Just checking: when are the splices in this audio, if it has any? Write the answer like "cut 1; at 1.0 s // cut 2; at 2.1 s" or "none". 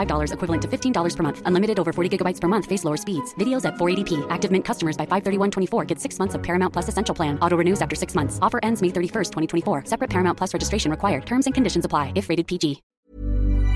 cut 1; at 12.9 s